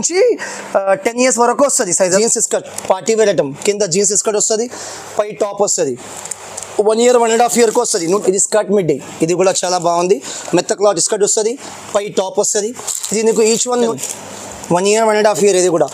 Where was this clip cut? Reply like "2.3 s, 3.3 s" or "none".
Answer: 2.2 s, 8.2 s, 13.9 s

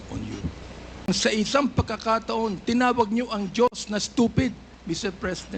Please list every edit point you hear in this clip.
1.0 s

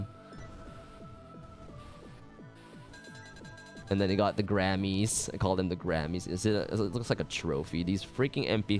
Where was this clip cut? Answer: 2.0 s

